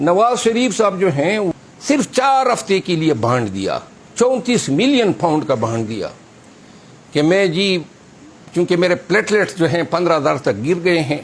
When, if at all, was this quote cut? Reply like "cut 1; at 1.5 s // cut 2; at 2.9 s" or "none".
cut 1; at 1.5 s